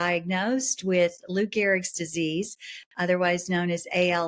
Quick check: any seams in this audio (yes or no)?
no